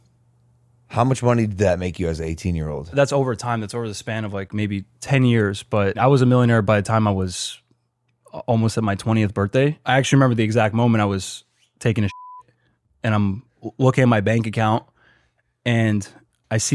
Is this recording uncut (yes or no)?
no